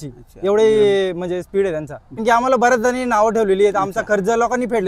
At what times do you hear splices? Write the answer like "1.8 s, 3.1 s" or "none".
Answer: 2.2 s